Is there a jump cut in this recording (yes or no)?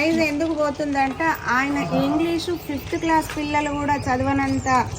no